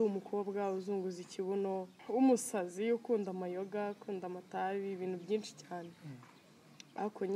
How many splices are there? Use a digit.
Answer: 1